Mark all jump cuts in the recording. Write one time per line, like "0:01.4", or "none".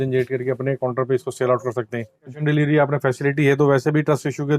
0:02.3